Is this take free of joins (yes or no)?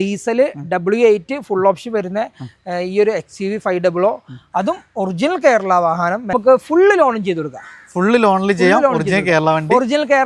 no